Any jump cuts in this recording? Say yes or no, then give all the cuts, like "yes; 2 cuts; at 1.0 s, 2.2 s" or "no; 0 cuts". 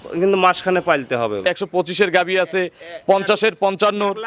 yes; 1 cut; at 1.4 s